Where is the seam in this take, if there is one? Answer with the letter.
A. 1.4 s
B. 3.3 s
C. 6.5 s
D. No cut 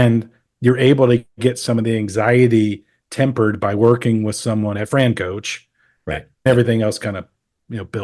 C